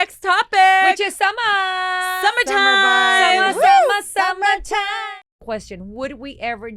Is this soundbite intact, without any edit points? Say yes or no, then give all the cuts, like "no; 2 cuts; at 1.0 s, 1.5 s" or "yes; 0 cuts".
no; 1 cut; at 4.9 s